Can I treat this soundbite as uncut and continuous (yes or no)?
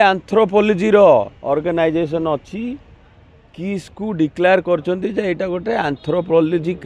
yes